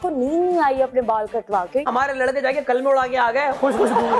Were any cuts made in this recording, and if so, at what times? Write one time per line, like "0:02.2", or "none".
0:01.8

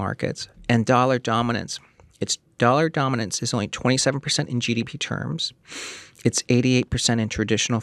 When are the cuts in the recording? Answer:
none

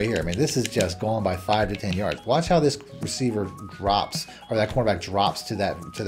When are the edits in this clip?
0:02.2

